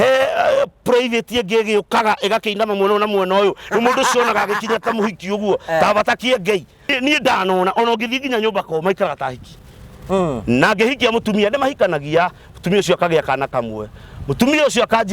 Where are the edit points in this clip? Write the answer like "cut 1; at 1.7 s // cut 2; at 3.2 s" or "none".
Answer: cut 1; at 6.9 s